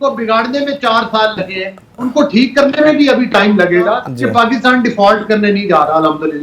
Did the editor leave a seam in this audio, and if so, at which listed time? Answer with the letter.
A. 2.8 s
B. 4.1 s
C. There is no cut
B